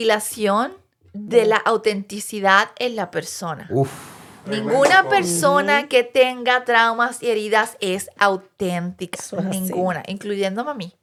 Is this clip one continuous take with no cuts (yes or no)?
yes